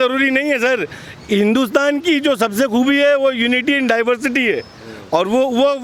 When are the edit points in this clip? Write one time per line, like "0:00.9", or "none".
none